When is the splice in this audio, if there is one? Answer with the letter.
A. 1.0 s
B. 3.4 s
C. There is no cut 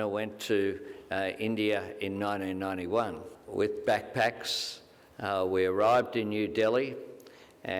B